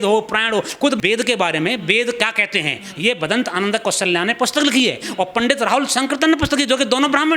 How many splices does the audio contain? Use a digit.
1